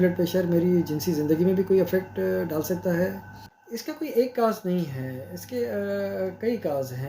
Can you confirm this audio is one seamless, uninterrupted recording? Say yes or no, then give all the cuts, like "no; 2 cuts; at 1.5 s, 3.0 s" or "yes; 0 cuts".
no; 1 cut; at 3.9 s